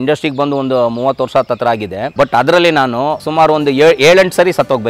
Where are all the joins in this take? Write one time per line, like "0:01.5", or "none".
0:02.0
0:03.2